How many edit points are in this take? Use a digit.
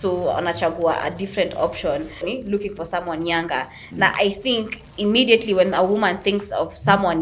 1